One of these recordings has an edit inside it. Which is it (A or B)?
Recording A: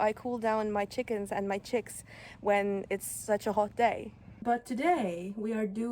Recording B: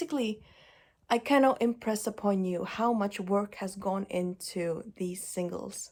A